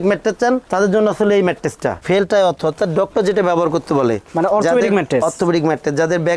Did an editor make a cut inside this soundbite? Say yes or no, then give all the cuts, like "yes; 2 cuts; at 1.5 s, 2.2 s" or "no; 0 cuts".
yes; 1 cut; at 2.0 s